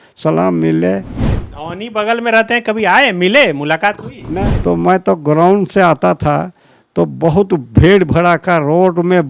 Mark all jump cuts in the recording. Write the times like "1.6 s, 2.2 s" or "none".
1.1 s, 4.3 s